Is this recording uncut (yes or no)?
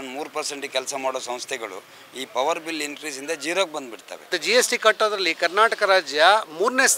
no